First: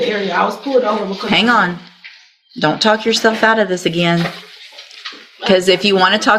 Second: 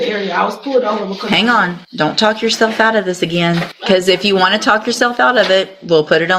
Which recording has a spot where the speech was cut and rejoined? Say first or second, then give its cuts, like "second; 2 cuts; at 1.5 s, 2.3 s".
second; 2 cuts; at 1.8 s, 3.7 s